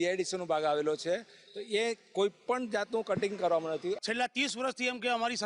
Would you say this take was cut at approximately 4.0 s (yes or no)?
yes